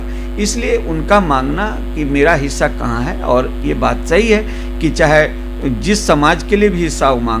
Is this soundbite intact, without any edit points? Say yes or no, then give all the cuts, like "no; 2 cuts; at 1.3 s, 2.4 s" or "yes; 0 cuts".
yes; 0 cuts